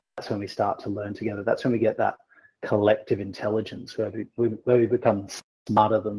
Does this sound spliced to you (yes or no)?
no